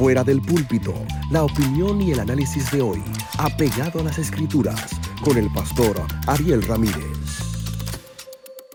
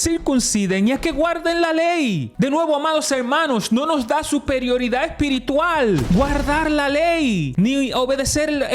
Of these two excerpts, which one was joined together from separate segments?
second; 3 cuts; at 2.3 s, 6.0 s, 7.5 s

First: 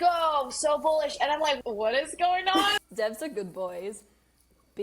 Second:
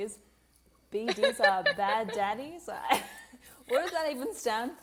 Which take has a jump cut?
first; 2 cuts; at 1.6 s, 2.8 s

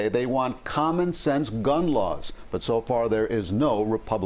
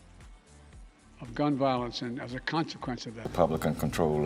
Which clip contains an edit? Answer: second; 1 cut; at 3.1 s

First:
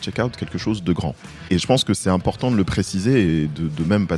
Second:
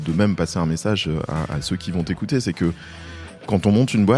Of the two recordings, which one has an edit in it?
first; 1 cut; at 1.6 s

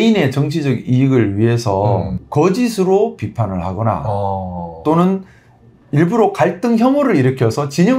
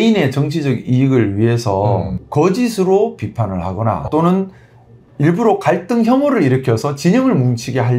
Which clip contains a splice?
second; 1 cut; at 4.0 s

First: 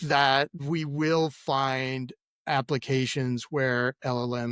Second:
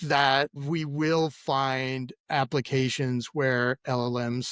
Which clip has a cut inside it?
second; 1 cut; at 2.1 s

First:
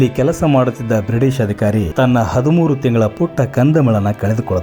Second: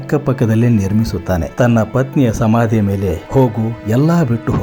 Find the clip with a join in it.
first; 1 cut; at 1.9 s

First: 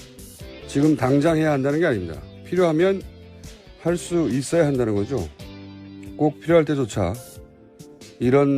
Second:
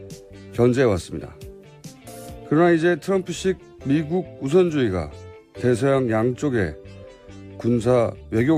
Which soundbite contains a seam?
first; 1 cut; at 1.8 s

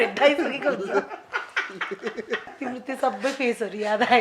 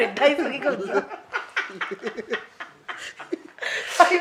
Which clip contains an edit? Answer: first; 1 cut; at 2.5 s

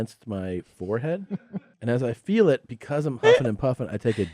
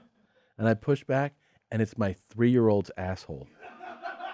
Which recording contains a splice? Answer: first; 1 cut; at 1.6 s

